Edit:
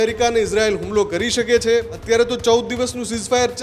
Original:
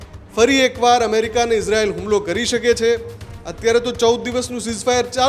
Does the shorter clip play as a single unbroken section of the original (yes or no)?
no